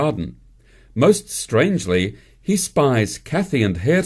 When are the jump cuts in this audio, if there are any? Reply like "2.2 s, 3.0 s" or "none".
1.3 s